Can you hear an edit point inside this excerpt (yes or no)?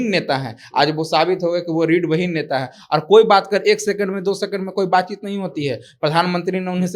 no